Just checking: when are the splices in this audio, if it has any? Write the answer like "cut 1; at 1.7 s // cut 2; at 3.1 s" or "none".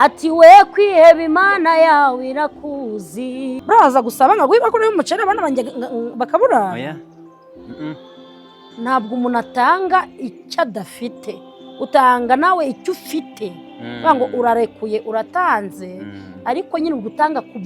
cut 1; at 3.6 s